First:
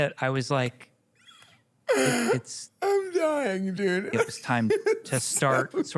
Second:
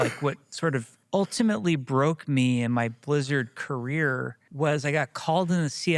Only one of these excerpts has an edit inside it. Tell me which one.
second; 2 cuts; at 0.9 s, 4.4 s

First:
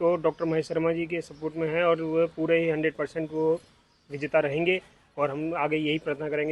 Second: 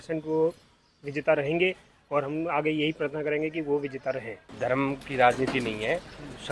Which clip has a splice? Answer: second; 1 cut; at 4.4 s

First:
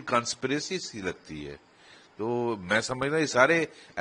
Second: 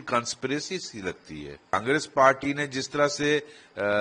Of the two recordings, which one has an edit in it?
second; 1 cut; at 1.7 s

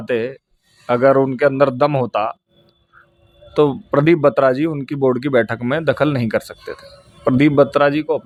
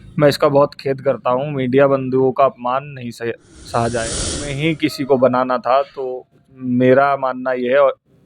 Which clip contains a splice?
second; 1 cut; at 4.4 s

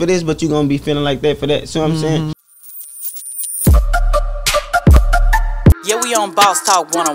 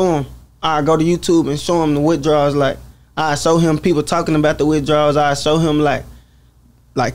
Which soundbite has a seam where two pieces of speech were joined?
first; 1 cut; at 2.4 s

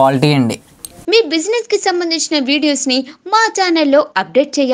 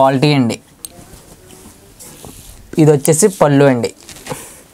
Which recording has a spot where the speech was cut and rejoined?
first; 1 cut; at 0.9 s

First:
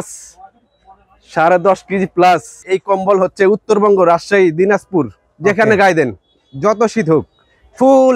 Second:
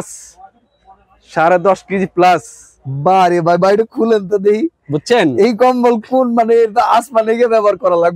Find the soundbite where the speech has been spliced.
first; 1 cut; at 2.6 s

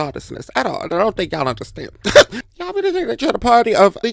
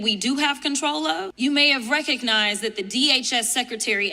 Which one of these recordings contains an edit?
second; 1 cut; at 1.3 s

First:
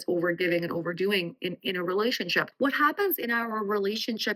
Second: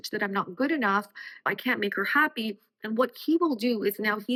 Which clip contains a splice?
first; 1 cut; at 2.5 s

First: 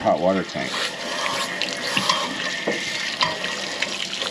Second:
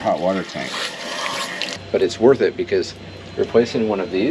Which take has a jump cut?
second; 1 cut; at 1.8 s

